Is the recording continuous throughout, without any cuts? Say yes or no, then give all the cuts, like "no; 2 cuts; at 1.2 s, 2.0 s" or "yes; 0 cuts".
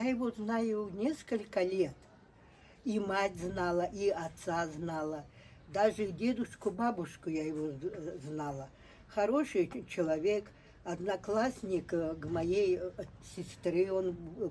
yes; 0 cuts